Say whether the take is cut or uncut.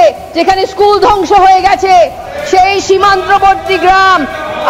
uncut